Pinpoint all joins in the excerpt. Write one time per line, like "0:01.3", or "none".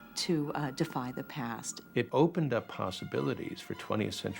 0:02.1